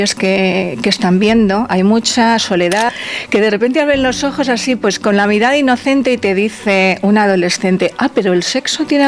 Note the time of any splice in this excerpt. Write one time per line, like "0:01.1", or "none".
0:01.7
0:03.0